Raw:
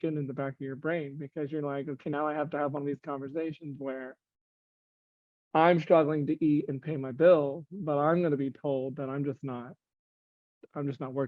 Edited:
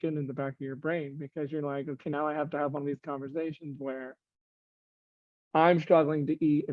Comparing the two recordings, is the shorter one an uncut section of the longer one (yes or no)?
yes